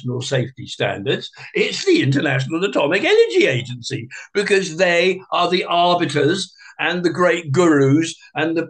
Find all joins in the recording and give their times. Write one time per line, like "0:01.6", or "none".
none